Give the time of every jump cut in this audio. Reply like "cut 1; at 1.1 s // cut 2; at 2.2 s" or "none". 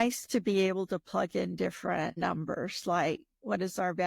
cut 1; at 2.1 s